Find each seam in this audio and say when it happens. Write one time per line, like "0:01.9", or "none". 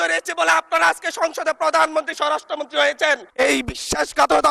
0:03.3

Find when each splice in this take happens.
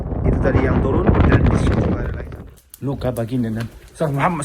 0:02.1

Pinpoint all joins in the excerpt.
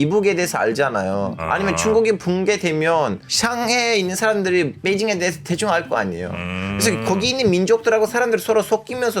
0:01.4

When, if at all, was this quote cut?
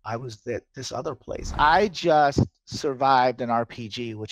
0:01.5

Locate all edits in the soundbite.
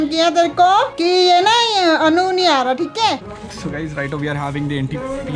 0:03.2

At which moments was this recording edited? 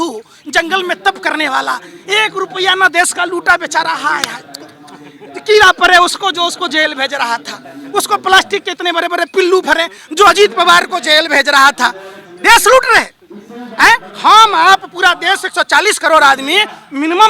none

